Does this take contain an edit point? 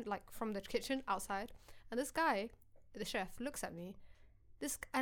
no; 0 cuts

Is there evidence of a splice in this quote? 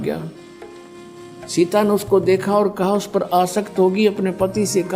no; 0 cuts

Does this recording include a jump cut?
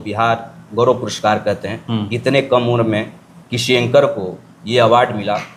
no; 0 cuts

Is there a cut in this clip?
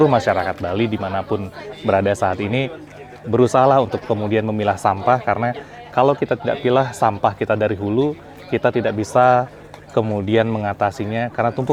no; 0 cuts

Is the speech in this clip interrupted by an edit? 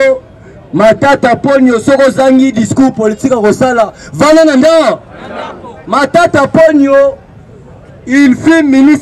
no; 0 cuts

